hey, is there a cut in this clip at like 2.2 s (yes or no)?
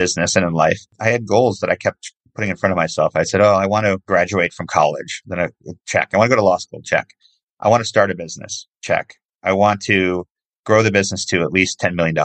no